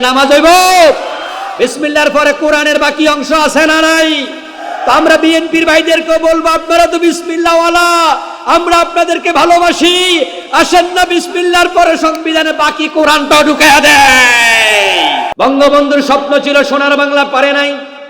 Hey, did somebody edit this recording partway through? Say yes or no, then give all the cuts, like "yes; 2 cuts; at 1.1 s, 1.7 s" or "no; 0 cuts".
yes; 1 cut; at 15.3 s